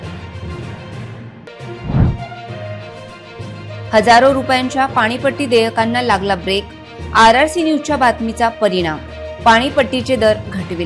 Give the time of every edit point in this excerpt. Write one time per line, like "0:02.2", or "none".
0:01.0